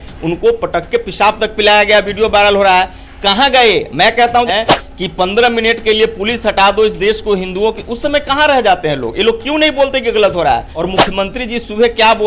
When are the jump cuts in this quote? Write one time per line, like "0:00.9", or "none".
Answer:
0:04.5
0:10.8